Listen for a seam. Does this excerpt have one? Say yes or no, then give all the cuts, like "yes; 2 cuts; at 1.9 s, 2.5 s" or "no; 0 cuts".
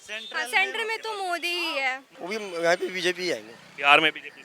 yes; 1 cut; at 2.1 s